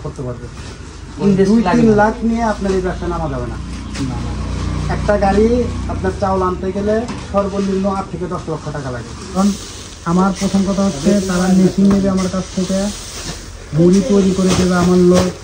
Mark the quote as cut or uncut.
cut